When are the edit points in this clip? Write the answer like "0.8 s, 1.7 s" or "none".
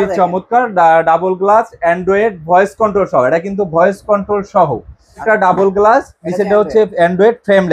5.2 s